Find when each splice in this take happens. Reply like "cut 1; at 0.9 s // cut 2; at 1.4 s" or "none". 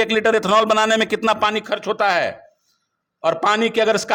none